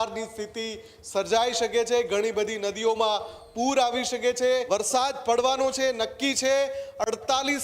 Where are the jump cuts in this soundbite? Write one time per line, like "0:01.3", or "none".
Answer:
0:04.6